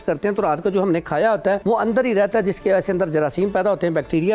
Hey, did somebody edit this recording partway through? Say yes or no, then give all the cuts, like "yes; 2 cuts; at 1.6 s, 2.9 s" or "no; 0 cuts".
yes; 1 cut; at 1.6 s